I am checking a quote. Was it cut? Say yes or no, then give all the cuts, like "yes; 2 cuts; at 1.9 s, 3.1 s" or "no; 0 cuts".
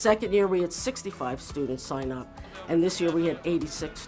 no; 0 cuts